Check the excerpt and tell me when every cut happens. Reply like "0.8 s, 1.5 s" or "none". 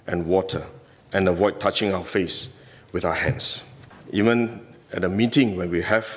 3.9 s